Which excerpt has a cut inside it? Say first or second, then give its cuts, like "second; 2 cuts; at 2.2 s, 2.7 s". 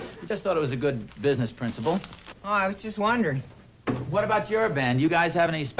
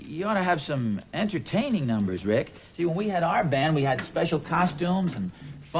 first; 1 cut; at 1.7 s